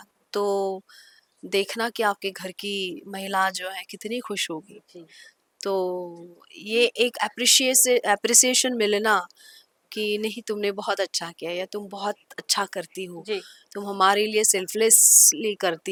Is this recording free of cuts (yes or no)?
yes